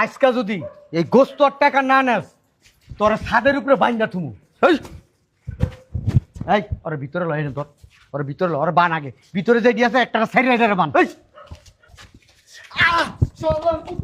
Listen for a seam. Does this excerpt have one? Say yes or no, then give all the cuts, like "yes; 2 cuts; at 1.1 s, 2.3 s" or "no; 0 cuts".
no; 0 cuts